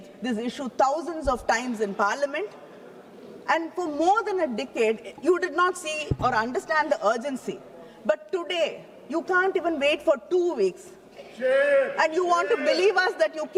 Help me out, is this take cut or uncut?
uncut